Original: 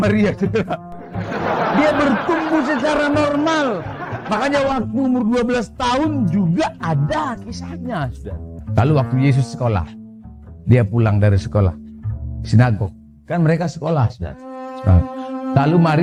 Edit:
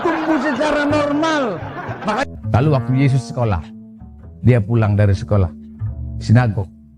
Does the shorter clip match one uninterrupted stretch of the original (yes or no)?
no